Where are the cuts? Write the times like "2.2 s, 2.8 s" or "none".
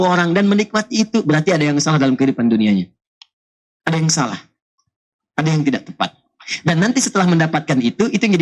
none

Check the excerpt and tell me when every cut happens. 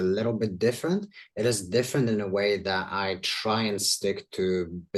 none

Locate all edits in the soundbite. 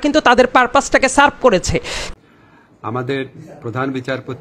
2.0 s

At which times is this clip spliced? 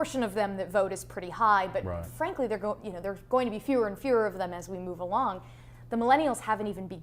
1.8 s

